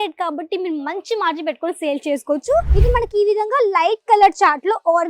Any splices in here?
yes; 1 cut; at 2.7 s

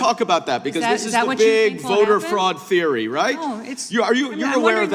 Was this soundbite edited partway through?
no; 0 cuts

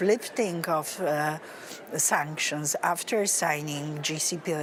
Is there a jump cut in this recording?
no; 0 cuts

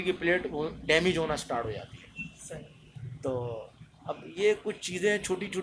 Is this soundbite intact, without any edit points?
yes; 0 cuts

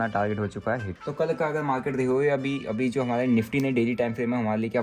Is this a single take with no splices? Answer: no; 1 cut; at 1.0 s

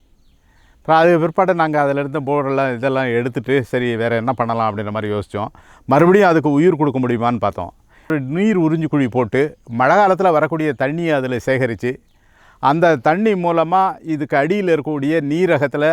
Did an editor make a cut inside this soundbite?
yes; 1 cut; at 8.1 s

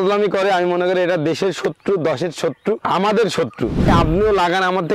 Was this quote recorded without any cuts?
no; 2 cuts; at 2.8 s, 3.9 s

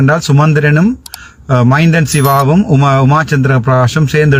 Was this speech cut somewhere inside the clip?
no; 0 cuts

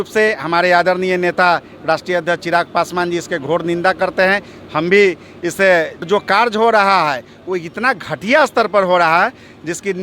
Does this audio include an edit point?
yes; 1 cut; at 6.0 s

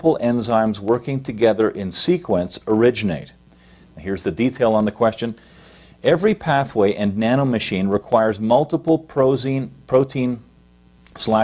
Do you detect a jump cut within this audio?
yes; 1 cut; at 8.3 s

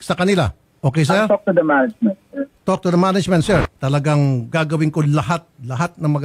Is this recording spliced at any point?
yes; 1 cut; at 3.6 s

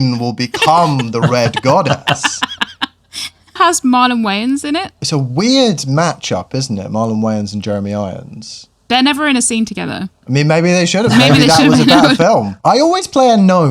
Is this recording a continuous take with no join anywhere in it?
no; 4 cuts; at 3.6 s, 4.9 s, 8.5 s, 12.5 s

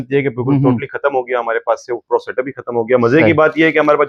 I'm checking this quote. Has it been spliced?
no; 0 cuts

